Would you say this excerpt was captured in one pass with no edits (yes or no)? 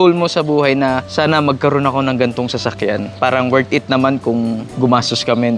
no